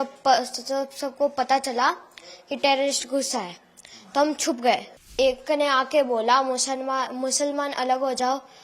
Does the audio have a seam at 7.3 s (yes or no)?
no